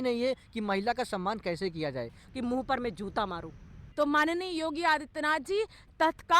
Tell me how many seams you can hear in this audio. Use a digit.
2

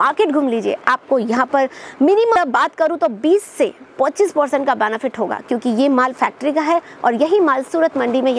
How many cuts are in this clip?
1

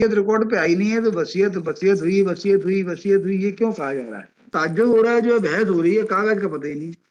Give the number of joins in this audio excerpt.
1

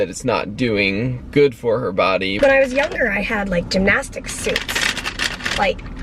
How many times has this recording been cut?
1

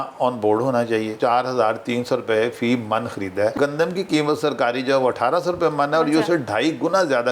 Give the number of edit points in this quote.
2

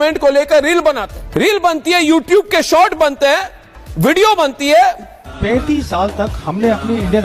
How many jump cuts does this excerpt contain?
2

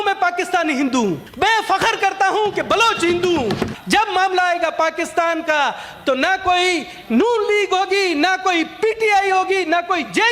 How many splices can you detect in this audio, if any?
2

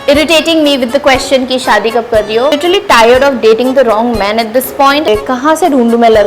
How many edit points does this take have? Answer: 2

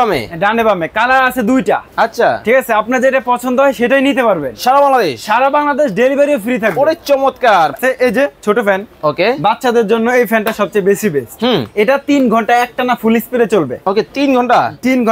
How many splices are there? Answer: 1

